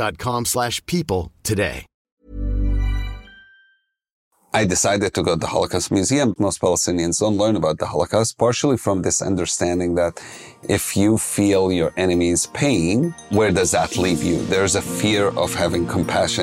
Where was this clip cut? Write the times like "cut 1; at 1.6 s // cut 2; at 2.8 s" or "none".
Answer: cut 1; at 1.9 s // cut 2; at 4.2 s // cut 3; at 6.3 s